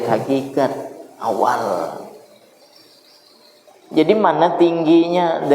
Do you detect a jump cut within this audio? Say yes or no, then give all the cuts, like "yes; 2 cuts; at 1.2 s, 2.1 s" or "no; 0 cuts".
yes; 1 cut; at 3.7 s